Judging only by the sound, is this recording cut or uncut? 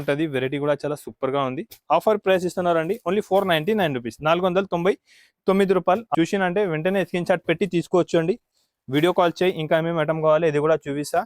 cut